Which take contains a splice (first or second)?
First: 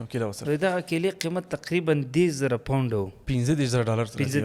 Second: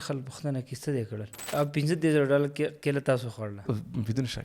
second